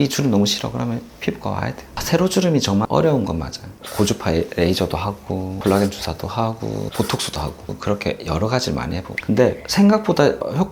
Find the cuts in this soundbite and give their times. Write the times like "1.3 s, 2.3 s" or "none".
1.9 s, 3.8 s, 5.5 s, 6.9 s

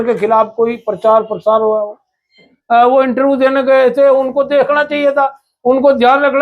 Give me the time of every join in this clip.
2.5 s

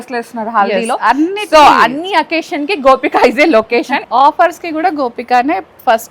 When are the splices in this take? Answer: 4.0 s

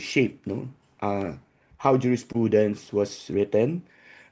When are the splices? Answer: none

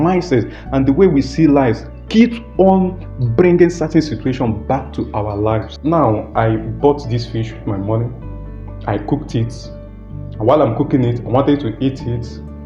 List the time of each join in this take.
5.7 s

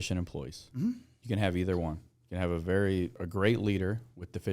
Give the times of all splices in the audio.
1.1 s, 3.2 s

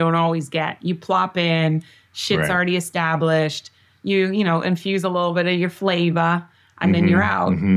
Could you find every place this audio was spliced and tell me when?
none

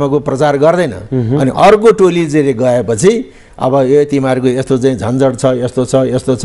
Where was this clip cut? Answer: 1.0 s

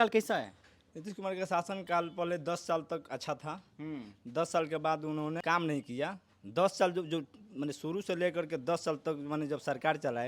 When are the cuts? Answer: 1.8 s, 5.4 s

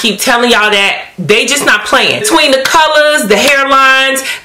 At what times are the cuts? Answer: 2.3 s

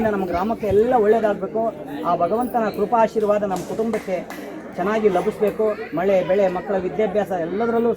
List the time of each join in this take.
none

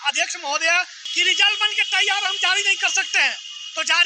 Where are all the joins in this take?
1.0 s

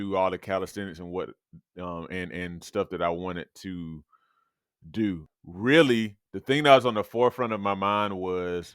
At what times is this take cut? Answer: 5.2 s

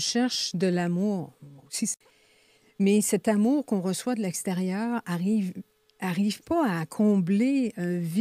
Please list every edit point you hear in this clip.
2.0 s

